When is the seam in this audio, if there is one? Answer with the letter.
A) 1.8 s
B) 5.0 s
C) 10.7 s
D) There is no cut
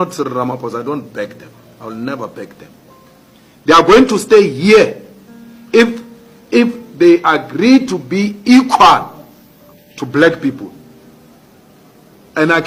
D